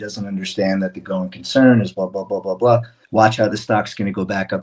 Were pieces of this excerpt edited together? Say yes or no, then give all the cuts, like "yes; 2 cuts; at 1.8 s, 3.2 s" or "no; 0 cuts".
yes; 1 cut; at 3.0 s